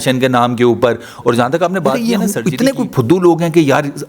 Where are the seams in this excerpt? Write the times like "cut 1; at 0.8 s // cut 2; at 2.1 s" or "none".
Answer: cut 1; at 2.0 s